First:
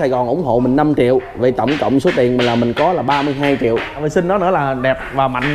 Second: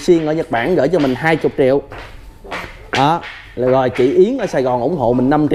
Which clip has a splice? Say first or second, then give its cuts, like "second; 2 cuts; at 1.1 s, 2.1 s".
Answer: first; 1 cut; at 4.0 s